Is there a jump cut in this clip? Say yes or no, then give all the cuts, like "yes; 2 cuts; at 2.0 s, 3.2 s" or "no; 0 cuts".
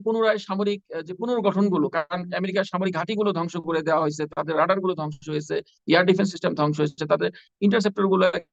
no; 0 cuts